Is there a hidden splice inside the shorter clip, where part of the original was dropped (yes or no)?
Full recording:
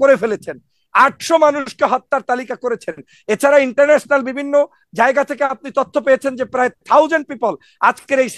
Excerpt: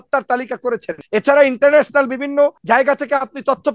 yes